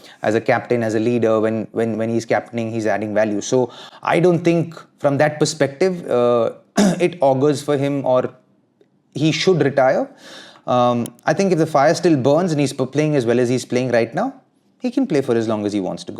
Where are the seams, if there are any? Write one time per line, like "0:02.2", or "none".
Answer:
none